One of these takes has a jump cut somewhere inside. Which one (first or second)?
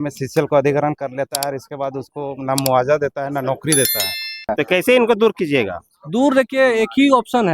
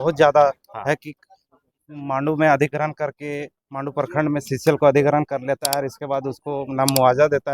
first